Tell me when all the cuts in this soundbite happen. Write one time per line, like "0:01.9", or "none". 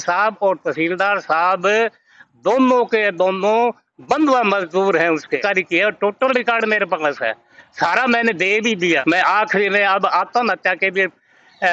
0:05.4
0:09.0